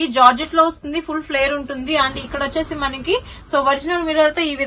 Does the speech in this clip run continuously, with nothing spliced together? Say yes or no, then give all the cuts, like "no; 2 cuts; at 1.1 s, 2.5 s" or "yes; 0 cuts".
yes; 0 cuts